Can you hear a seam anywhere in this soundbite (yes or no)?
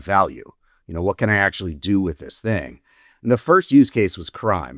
no